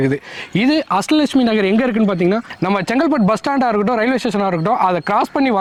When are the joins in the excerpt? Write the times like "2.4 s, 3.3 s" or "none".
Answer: none